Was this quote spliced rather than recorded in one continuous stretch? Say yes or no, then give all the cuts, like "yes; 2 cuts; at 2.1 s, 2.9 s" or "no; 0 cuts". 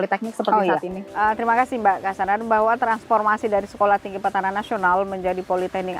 no; 0 cuts